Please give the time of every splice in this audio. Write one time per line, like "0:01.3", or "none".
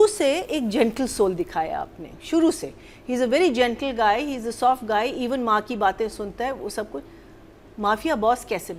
none